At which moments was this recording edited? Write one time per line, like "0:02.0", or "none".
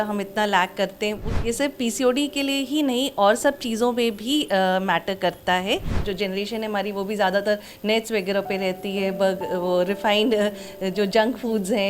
0:01.2
0:06.1